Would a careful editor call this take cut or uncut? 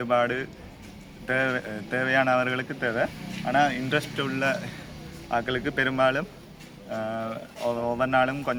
uncut